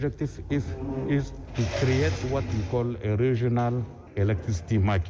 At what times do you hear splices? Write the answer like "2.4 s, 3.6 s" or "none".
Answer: 1.4 s, 4.0 s